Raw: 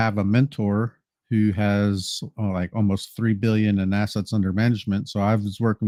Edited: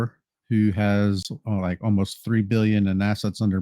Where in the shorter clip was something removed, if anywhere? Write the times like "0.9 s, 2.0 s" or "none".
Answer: 1.3 s